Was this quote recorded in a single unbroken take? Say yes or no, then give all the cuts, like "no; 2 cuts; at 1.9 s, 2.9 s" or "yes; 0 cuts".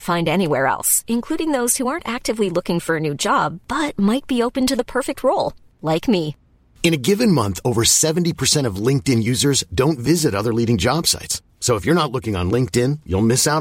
yes; 0 cuts